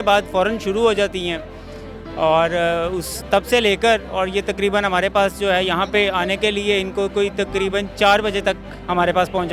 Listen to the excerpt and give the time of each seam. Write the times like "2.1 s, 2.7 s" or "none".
none